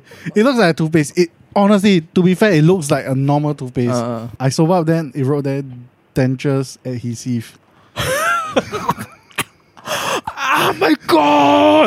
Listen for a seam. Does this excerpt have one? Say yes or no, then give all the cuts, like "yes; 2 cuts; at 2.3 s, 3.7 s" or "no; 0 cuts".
no; 0 cuts